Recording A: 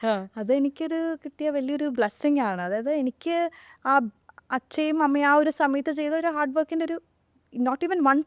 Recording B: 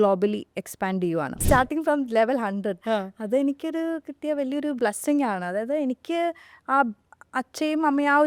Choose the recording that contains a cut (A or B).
B